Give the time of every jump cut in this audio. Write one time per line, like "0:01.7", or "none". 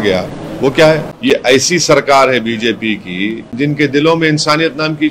0:01.1
0:03.5